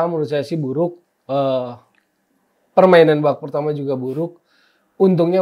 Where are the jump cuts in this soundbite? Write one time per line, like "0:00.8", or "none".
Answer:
none